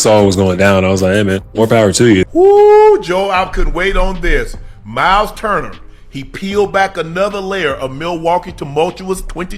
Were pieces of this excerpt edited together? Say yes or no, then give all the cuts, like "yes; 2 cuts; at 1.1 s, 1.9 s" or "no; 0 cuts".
yes; 1 cut; at 2.2 s